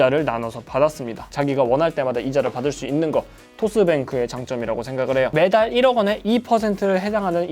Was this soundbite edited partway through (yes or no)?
yes